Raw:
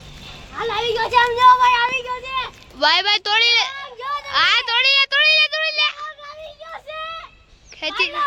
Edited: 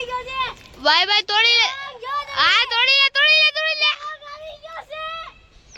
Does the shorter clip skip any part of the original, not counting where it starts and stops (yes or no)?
no